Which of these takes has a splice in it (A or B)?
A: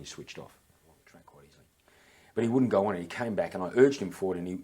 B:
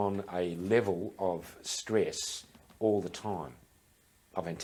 A